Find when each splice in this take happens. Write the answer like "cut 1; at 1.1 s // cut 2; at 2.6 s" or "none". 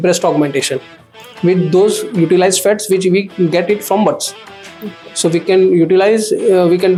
none